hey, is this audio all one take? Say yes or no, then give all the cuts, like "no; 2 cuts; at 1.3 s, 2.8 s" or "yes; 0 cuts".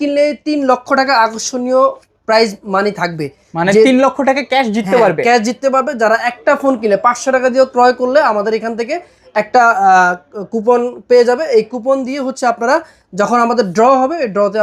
yes; 0 cuts